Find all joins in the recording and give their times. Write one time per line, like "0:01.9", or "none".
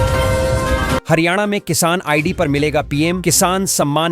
0:01.0